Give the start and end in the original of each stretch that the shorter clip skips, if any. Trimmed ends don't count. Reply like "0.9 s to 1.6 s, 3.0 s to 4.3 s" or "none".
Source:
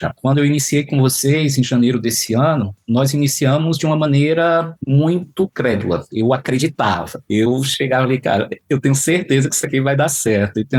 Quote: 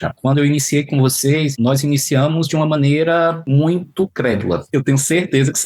1.5 s to 2.8 s, 4.7 s to 4.8 s, 6.1 s to 8.6 s